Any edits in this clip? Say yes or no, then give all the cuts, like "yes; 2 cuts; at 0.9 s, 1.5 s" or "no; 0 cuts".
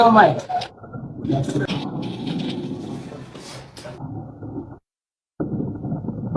yes; 1 cut; at 1.7 s